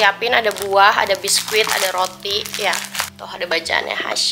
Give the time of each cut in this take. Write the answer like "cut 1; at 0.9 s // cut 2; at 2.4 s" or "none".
none